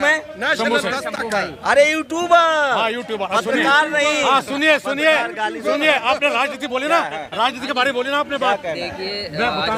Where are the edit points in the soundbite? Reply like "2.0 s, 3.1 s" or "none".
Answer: none